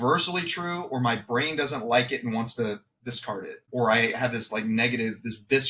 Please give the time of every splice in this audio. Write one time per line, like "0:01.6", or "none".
0:03.7